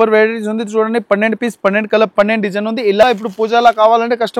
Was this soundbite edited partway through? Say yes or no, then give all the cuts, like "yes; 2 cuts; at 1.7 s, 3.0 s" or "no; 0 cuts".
yes; 1 cut; at 3.0 s